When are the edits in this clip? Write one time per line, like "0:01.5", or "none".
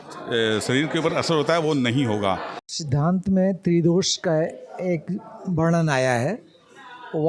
0:02.5